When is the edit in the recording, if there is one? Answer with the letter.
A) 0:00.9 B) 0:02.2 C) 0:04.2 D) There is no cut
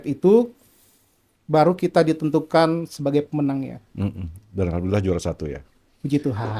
D